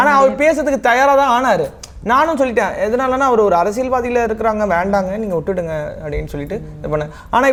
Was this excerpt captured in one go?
yes; 0 cuts

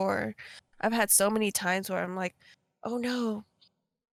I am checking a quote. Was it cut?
no; 0 cuts

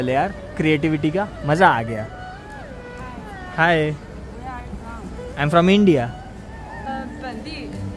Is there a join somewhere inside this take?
yes; 1 cut; at 6.9 s

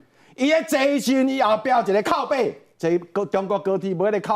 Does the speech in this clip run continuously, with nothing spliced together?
no; 1 cut; at 2.7 s

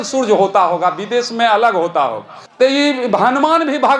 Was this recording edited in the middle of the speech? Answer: no; 0 cuts

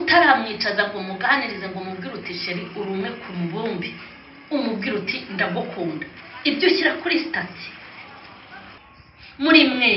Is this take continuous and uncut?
no; 1 cut; at 8.8 s

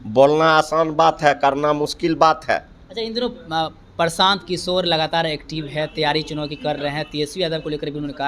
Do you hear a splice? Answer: no; 0 cuts

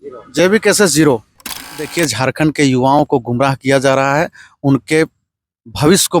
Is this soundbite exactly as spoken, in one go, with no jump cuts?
no; 1 cut; at 1.9 s

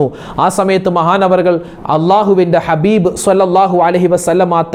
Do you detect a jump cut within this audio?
no; 0 cuts

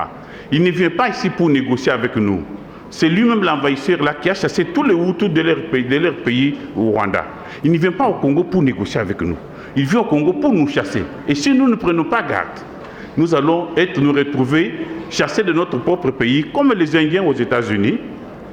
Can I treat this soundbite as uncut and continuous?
yes; 0 cuts

